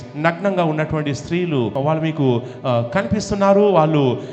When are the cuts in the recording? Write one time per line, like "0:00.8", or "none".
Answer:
0:01.7